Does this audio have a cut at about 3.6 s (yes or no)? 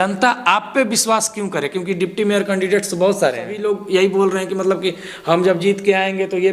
yes